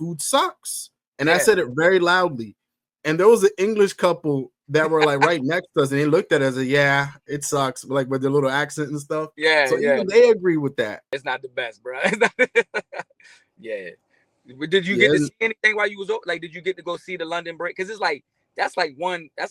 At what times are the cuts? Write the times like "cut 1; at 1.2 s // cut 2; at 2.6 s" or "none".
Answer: none

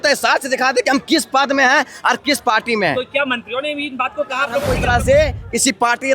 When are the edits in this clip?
cut 1; at 4.7 s

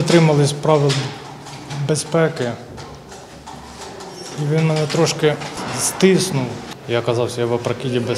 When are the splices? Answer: cut 1; at 5.5 s // cut 2; at 6.6 s

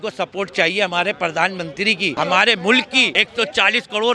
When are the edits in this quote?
cut 1; at 2.1 s // cut 2; at 3.1 s

